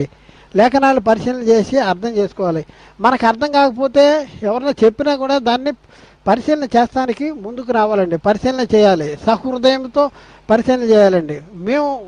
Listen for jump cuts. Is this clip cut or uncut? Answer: uncut